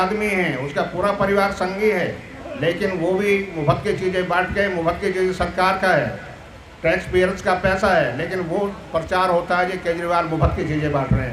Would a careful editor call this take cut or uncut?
uncut